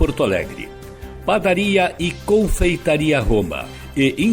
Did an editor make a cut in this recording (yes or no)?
no